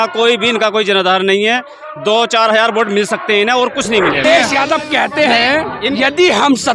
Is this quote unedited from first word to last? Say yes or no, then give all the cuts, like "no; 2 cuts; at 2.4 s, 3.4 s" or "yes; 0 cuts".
no; 1 cut; at 4.2 s